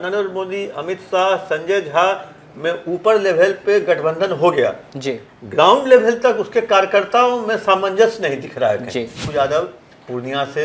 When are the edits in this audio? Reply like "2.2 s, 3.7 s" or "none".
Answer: 9.2 s